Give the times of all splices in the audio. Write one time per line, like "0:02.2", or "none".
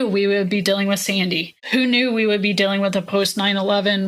0:01.5

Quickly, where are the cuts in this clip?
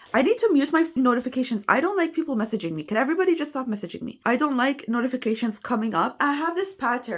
0:00.9
0:04.1

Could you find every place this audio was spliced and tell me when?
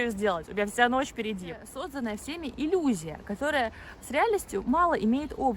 0:01.8

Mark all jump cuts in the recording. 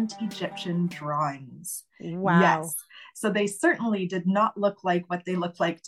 none

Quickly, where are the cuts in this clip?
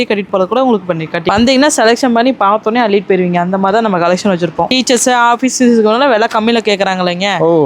0:01.2
0:04.7

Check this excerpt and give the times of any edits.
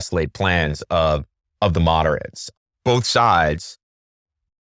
0:02.4

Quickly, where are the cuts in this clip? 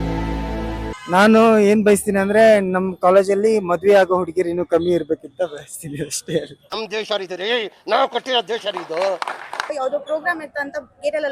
0:00.9
0:09.7

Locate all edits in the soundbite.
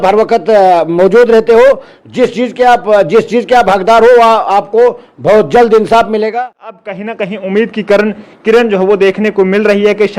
0:06.6

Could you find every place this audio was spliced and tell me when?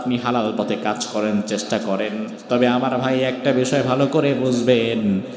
0:02.3

